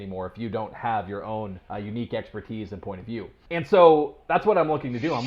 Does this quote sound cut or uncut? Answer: cut